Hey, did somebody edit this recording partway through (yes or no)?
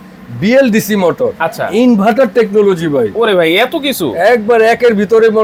no